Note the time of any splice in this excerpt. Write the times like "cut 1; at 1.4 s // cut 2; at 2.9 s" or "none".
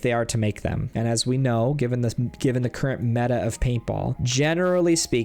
cut 1; at 0.8 s // cut 2; at 4.2 s